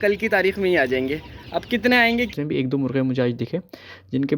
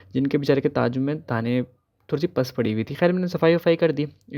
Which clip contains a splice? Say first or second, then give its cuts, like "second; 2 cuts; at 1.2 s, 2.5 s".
first; 1 cut; at 2.3 s